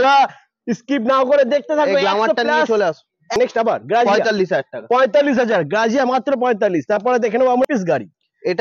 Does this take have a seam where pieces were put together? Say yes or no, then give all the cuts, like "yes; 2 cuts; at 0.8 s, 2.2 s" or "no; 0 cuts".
yes; 2 cuts; at 3.4 s, 7.7 s